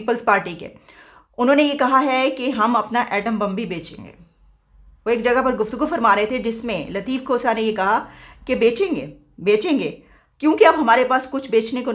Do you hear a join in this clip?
no; 0 cuts

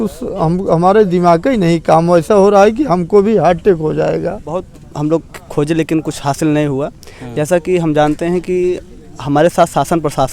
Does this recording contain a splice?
yes; 1 cut; at 4.8 s

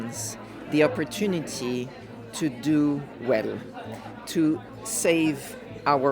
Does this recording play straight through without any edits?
no; 1 cut; at 4.7 s

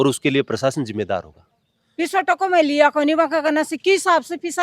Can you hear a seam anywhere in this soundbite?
yes; 1 cut; at 1.4 s

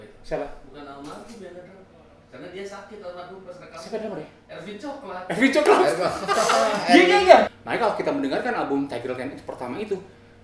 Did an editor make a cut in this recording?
yes; 1 cut; at 7.6 s

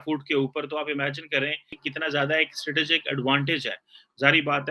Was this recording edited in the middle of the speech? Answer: yes; 1 cut; at 1.8 s

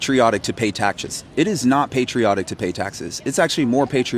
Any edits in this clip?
no; 0 cuts

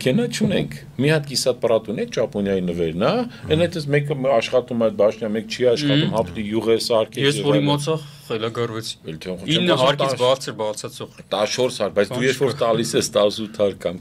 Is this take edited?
no; 0 cuts

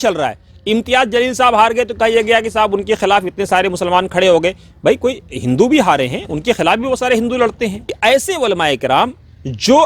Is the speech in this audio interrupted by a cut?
yes; 1 cut; at 7.9 s

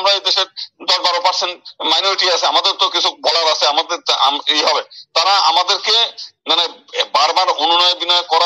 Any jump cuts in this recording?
no; 0 cuts

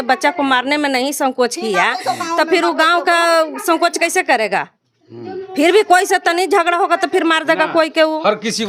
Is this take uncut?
yes; 0 cuts

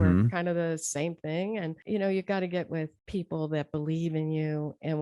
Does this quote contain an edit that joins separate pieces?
yes; 2 cuts; at 1.8 s, 3.0 s

